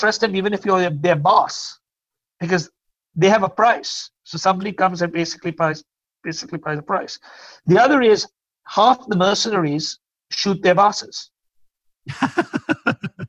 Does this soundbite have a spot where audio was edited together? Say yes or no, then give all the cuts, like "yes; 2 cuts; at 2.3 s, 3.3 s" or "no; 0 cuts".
yes; 1 cut; at 5.7 s